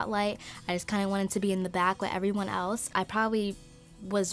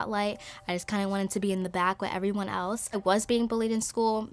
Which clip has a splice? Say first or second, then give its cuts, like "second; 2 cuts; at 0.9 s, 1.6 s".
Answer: second; 1 cut; at 2.9 s